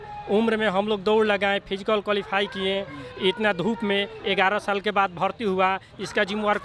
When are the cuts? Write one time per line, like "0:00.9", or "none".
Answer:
none